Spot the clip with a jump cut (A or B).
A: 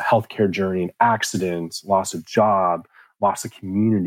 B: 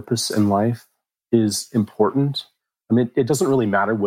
B